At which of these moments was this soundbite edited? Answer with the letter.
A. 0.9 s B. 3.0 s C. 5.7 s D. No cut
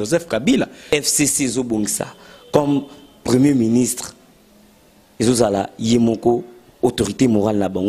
A